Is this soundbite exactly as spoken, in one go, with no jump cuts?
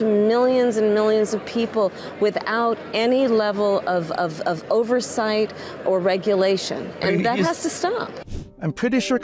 yes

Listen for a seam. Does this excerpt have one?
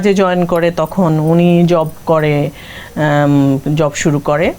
no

